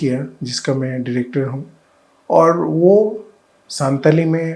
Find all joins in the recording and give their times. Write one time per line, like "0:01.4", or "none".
none